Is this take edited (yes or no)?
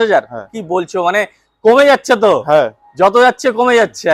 no